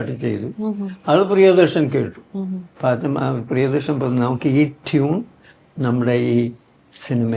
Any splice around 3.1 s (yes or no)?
no